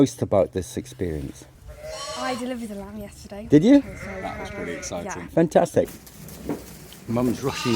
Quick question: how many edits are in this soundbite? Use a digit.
1